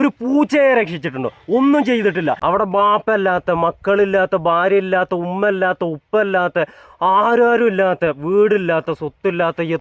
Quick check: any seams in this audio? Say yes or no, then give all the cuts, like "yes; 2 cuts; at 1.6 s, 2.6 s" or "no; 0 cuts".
yes; 1 cut; at 2.4 s